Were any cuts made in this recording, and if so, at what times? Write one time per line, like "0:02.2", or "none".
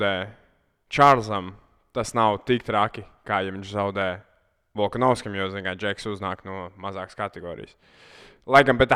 none